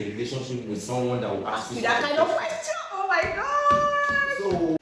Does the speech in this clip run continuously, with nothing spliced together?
yes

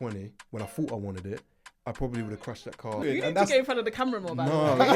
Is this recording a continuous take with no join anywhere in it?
no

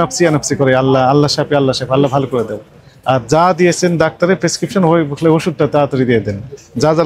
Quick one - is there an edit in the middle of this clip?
no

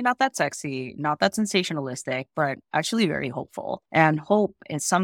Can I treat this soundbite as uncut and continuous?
yes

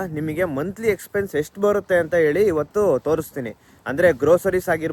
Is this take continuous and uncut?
yes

